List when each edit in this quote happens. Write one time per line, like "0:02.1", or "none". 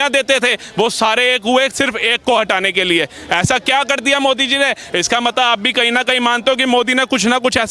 none